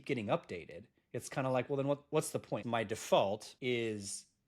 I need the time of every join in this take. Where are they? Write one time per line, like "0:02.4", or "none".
0:02.6
0:03.5

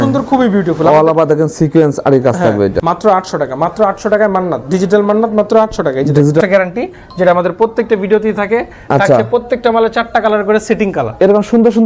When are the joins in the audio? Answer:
0:02.8
0:06.4

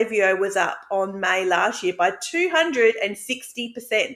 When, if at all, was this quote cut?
none

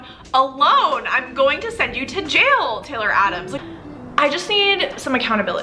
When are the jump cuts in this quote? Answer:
0:03.5

